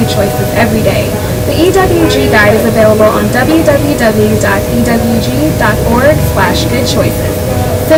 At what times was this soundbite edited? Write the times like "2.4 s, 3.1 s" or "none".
none